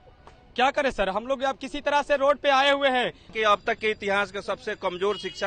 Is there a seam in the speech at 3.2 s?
yes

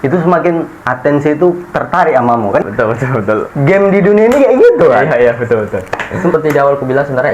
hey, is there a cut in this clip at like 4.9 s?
no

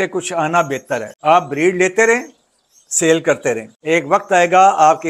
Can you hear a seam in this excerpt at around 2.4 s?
no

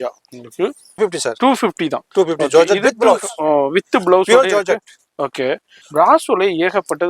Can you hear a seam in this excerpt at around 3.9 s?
no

